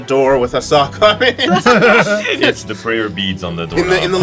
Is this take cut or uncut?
cut